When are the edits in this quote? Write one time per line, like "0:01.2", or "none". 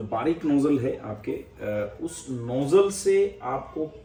none